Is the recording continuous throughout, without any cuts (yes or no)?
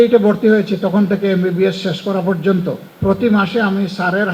no